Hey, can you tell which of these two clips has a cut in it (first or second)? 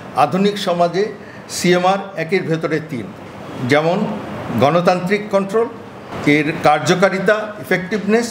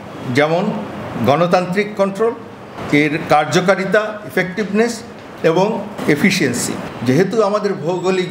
second